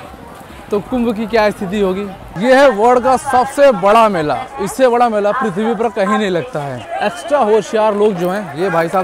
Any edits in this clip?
yes; 2 cuts; at 2.3 s, 6.8 s

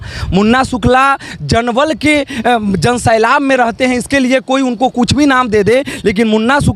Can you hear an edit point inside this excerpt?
no; 0 cuts

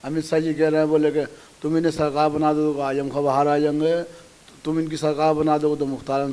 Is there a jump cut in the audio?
no; 0 cuts

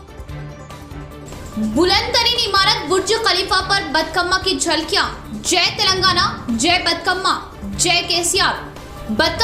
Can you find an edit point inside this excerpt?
yes; 1 cut; at 1.0 s

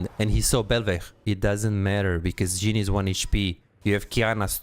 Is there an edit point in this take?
yes; 1 cut; at 1.1 s

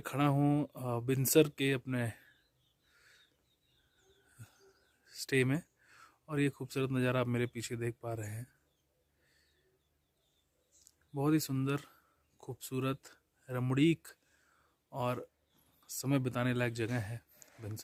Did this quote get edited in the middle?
no; 0 cuts

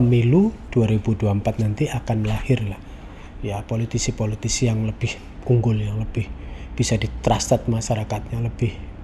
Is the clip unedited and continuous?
yes; 0 cuts

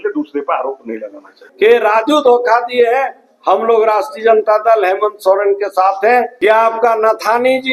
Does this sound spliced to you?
yes; 2 cuts; at 1.4 s, 6.3 s

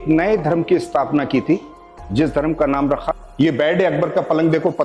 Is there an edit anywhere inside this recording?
yes; 1 cut; at 3.0 s

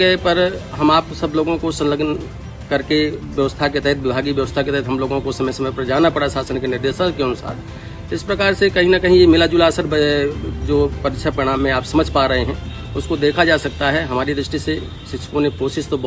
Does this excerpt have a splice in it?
yes; 1 cut; at 0.9 s

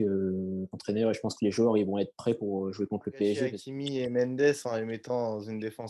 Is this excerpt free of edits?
no; 1 cut; at 3.6 s

